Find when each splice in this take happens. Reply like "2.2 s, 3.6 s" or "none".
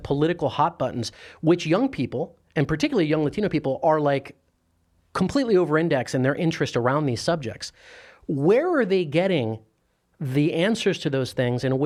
none